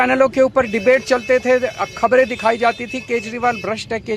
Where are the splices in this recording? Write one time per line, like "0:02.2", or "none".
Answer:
none